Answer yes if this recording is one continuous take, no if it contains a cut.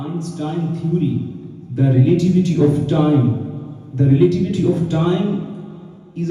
yes